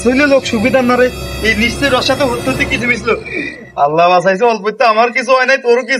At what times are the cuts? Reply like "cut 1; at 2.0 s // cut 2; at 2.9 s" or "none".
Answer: none

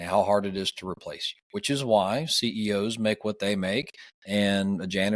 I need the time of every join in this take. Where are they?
none

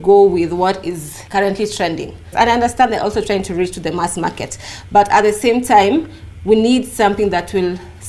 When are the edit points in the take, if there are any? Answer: cut 1; at 1.1 s // cut 2; at 2.2 s

